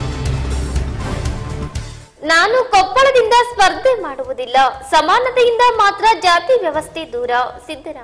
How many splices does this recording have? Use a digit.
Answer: 0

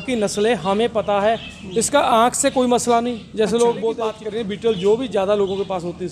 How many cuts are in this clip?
1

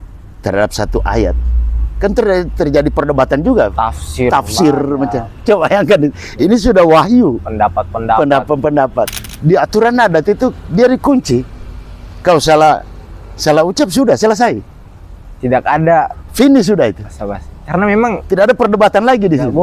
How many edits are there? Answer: 1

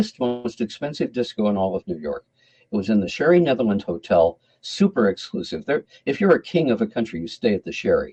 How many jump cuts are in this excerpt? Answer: 0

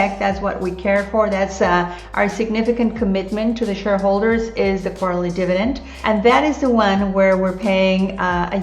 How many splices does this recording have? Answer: 1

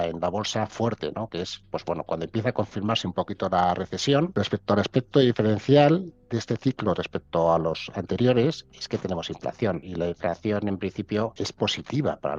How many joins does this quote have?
3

